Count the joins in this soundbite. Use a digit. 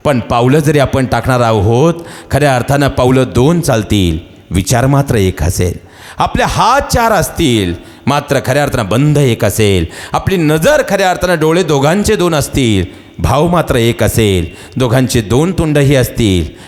0